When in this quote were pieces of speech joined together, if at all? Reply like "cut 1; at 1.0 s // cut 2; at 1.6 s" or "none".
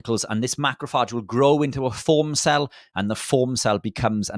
none

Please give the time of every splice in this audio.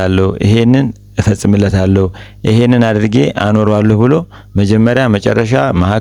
none

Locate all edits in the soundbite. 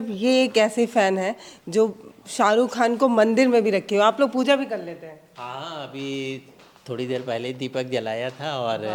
none

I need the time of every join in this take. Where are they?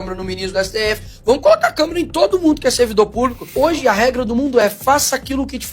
cut 1; at 3.5 s

